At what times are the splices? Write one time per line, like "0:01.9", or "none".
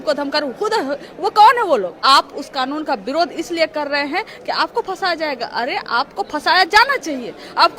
0:02.0